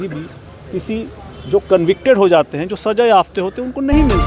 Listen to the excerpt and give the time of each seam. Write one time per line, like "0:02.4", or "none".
none